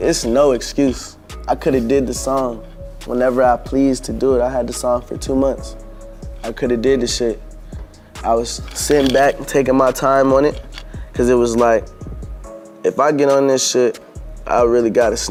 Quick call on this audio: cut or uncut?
uncut